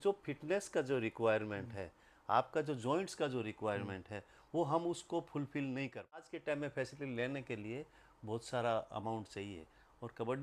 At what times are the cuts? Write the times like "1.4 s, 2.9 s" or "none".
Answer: 6.3 s